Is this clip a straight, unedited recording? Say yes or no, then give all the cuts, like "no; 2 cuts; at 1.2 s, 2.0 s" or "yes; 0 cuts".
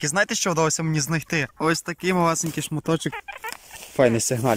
no; 1 cut; at 3.2 s